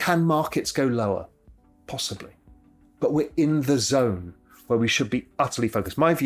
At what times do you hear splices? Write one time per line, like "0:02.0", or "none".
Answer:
none